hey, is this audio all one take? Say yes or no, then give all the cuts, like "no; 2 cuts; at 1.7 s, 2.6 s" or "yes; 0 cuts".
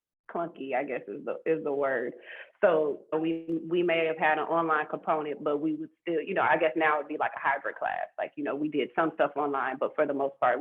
no; 1 cut; at 3.1 s